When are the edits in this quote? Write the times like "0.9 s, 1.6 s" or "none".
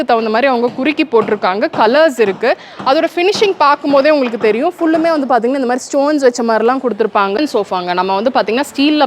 7.4 s